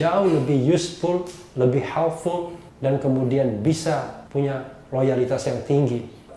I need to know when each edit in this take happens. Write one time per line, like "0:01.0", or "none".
0:04.2